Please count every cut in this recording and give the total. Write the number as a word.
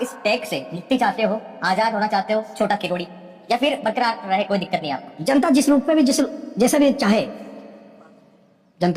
zero